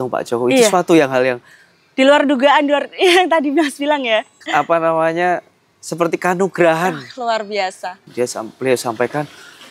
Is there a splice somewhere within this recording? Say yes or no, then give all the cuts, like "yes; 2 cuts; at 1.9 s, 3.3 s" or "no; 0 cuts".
yes; 1 cut; at 8.0 s